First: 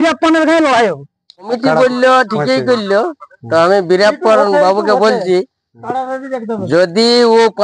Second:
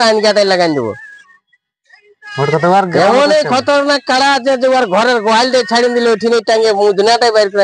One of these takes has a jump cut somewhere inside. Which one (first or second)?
first